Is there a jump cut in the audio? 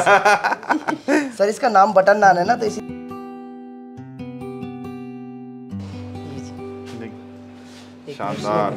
no; 0 cuts

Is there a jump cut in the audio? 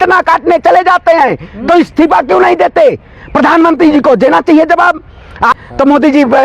yes; 1 cut; at 5.5 s

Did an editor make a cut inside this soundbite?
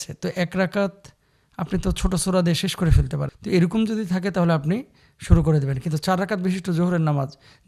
yes; 1 cut; at 3.2 s

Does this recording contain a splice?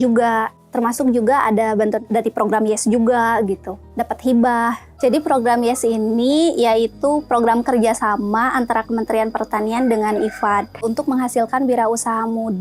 no; 0 cuts

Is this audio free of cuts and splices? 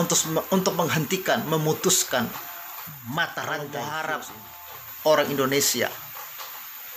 no; 1 cut; at 3.7 s

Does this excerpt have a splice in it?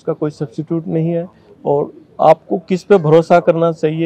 no; 0 cuts

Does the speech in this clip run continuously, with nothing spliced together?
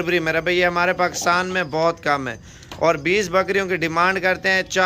yes; 0 cuts

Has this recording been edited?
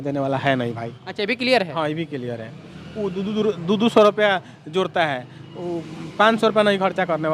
no; 0 cuts

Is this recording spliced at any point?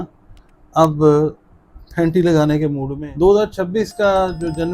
yes; 1 cut; at 2.9 s

